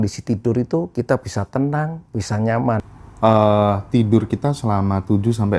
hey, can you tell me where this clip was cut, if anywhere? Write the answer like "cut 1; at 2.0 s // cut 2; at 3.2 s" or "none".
cut 1; at 2.9 s